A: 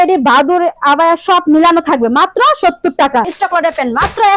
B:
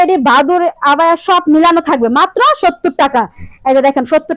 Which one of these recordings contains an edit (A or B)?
A